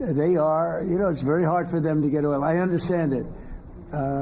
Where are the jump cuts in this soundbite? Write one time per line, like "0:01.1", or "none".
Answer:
0:03.2